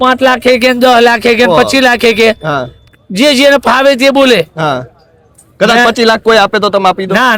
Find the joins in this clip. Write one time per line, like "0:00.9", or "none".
none